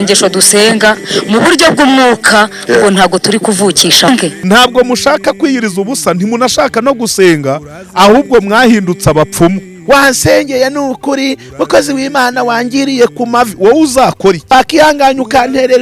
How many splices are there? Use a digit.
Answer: 3